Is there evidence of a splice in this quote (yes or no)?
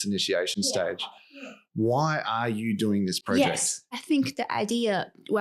yes